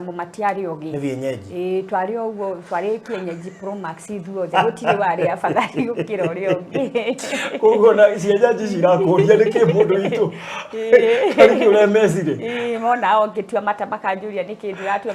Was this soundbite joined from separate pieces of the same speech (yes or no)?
no